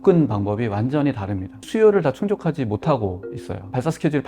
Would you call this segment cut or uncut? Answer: cut